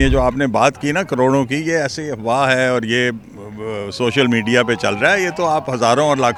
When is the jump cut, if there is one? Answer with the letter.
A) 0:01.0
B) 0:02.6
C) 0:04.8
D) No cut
D